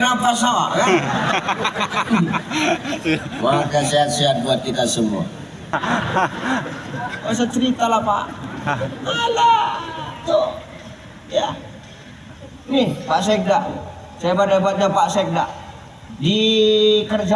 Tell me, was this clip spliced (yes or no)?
yes